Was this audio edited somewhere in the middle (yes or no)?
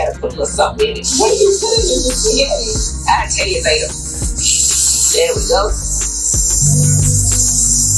no